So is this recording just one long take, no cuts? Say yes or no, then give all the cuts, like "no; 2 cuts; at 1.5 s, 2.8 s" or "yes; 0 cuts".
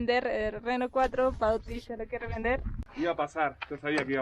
no; 1 cut; at 2.8 s